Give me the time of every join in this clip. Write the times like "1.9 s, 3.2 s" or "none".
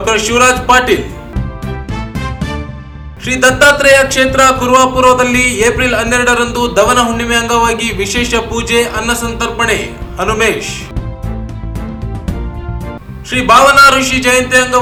none